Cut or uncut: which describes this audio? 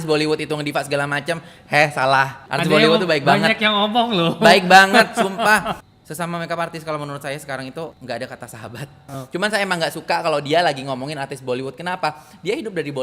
cut